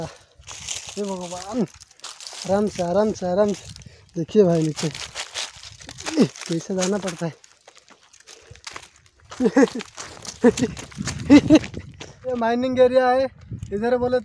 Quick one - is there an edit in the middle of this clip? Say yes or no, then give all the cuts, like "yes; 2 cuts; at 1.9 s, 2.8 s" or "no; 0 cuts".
yes; 1 cut; at 12.3 s